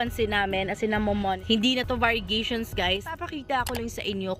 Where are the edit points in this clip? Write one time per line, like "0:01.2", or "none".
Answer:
0:01.4
0:03.2